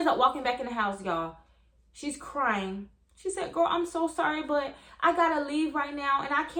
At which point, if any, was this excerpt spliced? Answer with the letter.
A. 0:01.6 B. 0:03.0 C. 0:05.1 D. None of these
D